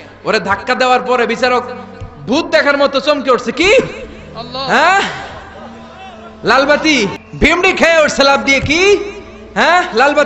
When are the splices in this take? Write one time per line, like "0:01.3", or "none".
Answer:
0:07.2